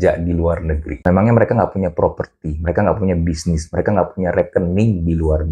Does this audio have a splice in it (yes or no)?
no